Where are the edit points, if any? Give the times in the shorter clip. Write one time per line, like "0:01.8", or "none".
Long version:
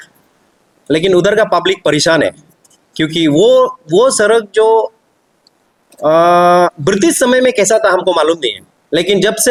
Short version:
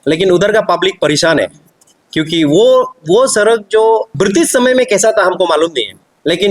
0:04.1